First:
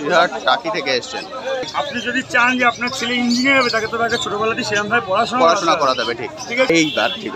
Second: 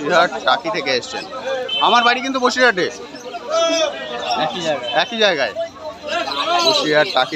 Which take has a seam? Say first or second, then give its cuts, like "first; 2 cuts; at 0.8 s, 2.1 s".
first; 2 cuts; at 1.7 s, 6.7 s